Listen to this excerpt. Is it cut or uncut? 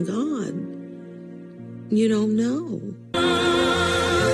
cut